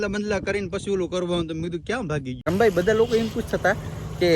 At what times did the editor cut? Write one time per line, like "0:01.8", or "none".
0:02.4